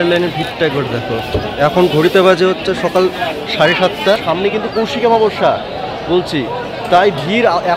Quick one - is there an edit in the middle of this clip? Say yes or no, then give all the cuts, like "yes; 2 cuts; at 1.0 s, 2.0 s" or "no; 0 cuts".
yes; 1 cut; at 4.2 s